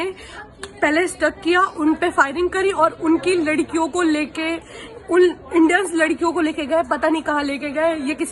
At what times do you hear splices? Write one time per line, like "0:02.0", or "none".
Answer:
none